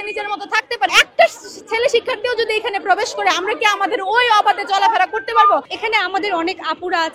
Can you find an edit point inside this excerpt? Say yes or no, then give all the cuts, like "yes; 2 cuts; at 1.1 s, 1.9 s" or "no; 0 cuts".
yes; 2 cuts; at 0.9 s, 5.7 s